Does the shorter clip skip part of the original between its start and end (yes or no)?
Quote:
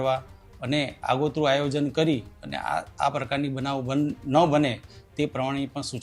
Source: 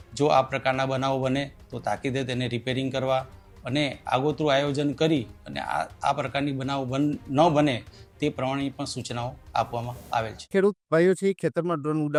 no